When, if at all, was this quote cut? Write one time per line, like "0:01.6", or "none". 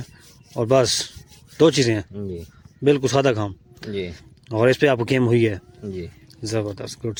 none